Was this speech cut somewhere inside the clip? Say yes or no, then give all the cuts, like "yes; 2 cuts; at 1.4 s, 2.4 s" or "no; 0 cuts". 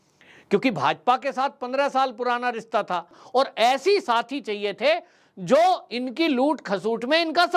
yes; 1 cut; at 3.2 s